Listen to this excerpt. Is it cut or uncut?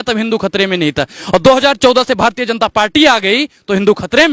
uncut